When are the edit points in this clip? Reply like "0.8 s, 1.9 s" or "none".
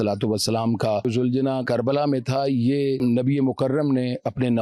1.6 s, 3.0 s